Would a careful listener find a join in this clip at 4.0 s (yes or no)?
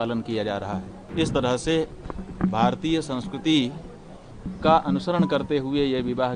no